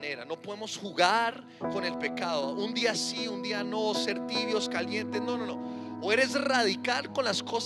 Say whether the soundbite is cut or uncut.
uncut